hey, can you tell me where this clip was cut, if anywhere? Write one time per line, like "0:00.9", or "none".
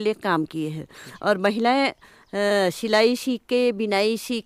none